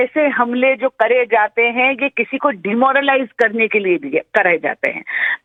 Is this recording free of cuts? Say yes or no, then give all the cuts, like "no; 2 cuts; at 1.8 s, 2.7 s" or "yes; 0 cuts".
yes; 0 cuts